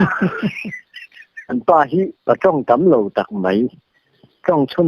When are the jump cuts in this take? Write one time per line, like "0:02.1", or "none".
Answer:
0:01.5